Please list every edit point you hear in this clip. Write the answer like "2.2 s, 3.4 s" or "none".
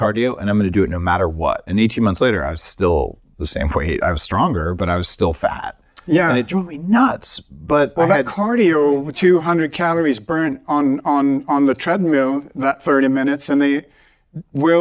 none